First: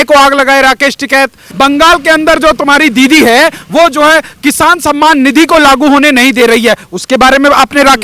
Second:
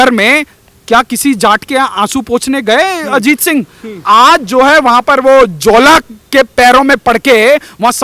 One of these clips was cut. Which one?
first; 1 cut; at 1.4 s

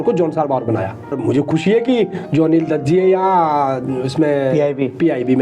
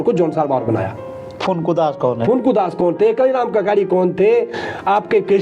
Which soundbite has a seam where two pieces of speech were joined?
first; 1 cut; at 1.2 s

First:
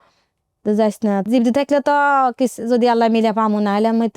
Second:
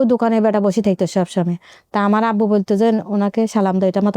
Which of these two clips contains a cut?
first; 1 cut; at 1.2 s

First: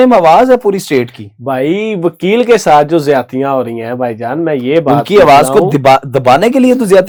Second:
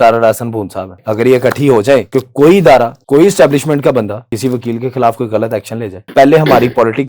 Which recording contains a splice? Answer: second; 5 cuts; at 1.0 s, 2.1 s, 3.0 s, 4.2 s, 6.1 s

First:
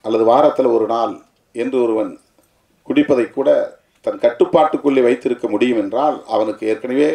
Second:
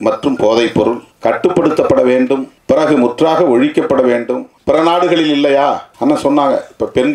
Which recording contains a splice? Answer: second; 4 cuts; at 1.1 s, 2.5 s, 4.5 s, 5.9 s

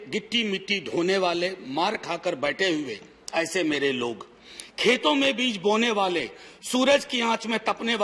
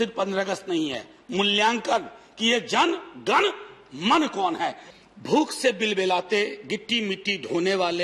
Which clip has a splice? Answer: second; 1 cut; at 4.8 s

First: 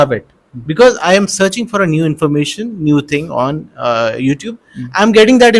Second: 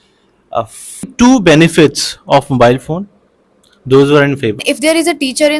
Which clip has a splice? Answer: second; 2 cuts; at 1.1 s, 4.6 s

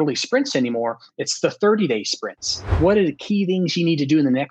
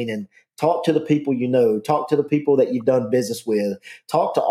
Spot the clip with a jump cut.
first; 1 cut; at 2.7 s

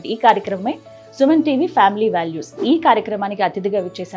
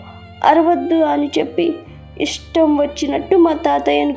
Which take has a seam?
first; 1 cut; at 2.5 s

